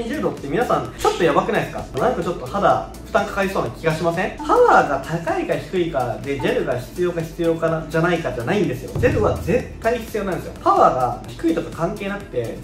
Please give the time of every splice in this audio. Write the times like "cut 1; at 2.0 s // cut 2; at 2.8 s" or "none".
cut 1; at 0.9 s // cut 2; at 1.9 s // cut 3; at 4.4 s // cut 4; at 10.5 s